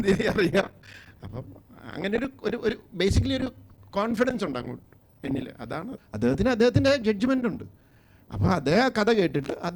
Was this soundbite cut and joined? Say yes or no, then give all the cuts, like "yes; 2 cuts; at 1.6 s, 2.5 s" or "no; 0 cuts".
yes; 1 cut; at 6.0 s